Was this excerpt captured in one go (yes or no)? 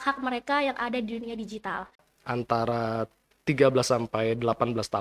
no